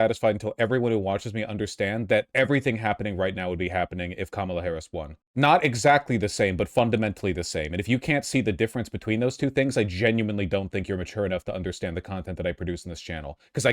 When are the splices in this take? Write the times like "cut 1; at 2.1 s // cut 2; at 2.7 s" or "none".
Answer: cut 1; at 5.1 s